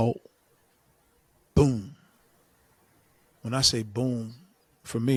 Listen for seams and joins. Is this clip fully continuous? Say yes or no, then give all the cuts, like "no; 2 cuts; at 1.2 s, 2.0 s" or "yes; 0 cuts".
yes; 0 cuts